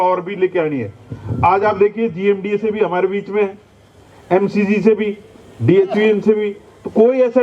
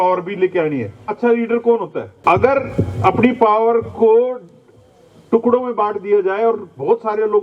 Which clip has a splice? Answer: second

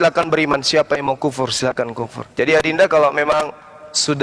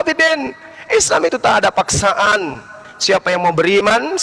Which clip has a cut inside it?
first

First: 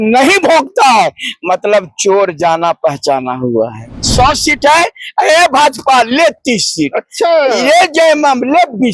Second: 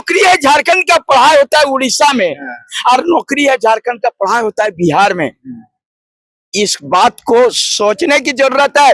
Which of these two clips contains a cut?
first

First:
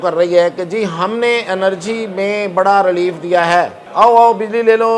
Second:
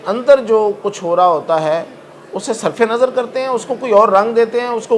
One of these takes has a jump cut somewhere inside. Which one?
first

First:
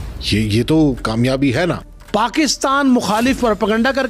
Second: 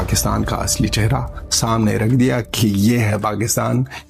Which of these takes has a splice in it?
first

